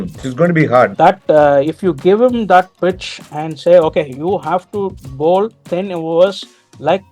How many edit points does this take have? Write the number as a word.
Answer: one